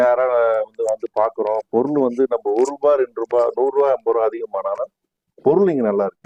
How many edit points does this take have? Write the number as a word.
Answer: zero